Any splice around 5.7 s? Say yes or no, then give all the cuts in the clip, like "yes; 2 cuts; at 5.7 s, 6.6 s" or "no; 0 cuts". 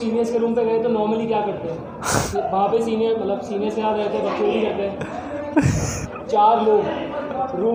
no; 0 cuts